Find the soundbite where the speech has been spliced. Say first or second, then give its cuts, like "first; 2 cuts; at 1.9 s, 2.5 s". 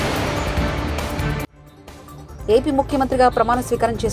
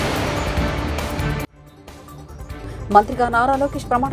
second; 1 cut; at 2.4 s